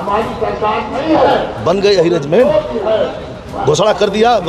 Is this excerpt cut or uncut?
uncut